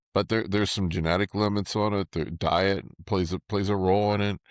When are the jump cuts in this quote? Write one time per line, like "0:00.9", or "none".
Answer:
0:02.9